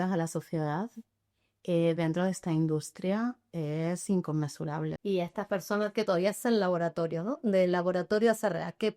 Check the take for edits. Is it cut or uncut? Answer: cut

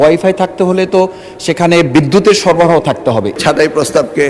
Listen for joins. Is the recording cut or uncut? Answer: cut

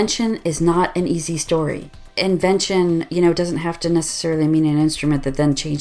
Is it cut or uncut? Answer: cut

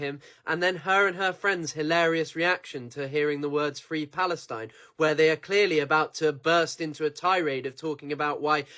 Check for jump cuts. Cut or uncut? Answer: cut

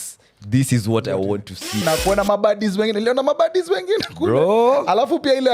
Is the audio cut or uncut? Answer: cut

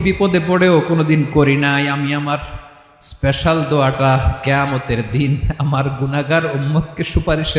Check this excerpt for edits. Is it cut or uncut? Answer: uncut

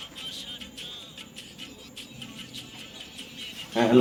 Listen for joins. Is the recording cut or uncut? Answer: uncut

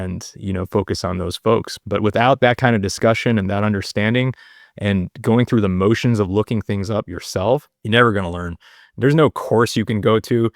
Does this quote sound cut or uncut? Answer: cut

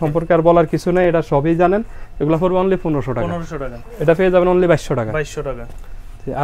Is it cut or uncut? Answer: uncut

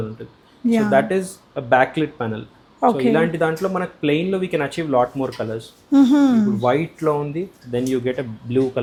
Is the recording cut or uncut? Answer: uncut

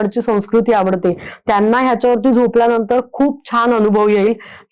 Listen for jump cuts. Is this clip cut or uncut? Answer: uncut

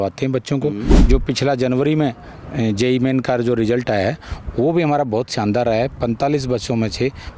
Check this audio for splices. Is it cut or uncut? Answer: cut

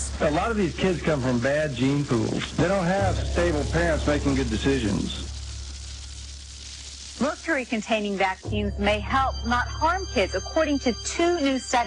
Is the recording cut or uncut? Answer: cut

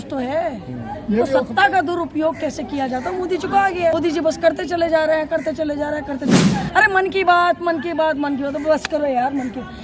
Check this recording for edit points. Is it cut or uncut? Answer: cut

